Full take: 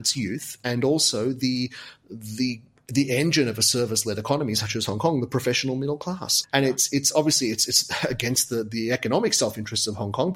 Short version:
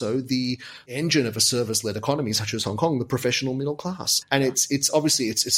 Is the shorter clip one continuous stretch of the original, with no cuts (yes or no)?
no